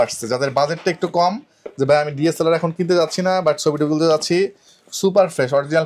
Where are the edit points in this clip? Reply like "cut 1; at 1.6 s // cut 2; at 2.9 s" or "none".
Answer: none

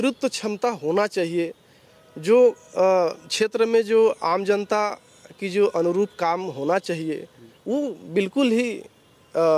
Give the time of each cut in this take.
none

